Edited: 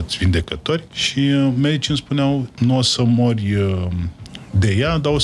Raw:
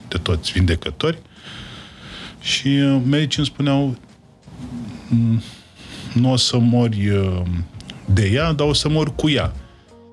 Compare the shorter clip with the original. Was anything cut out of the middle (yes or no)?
yes